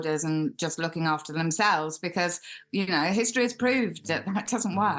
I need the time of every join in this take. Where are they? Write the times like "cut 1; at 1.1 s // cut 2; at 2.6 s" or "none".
none